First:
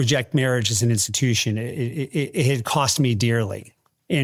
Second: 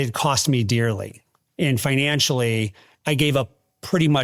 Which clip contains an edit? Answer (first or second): second